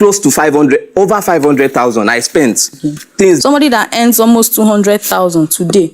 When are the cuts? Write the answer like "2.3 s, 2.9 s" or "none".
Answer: 3.4 s